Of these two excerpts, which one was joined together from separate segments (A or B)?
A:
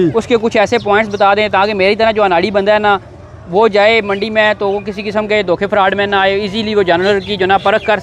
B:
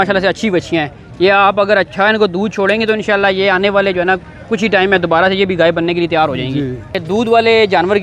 B